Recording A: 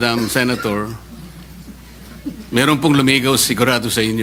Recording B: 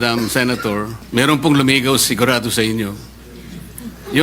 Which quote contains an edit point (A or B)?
B